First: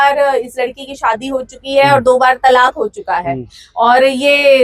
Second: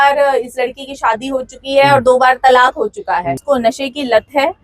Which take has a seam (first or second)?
second